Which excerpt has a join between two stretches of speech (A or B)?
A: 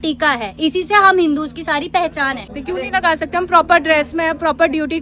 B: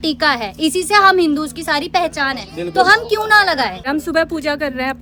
A